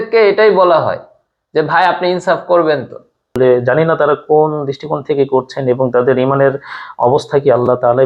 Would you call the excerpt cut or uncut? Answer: cut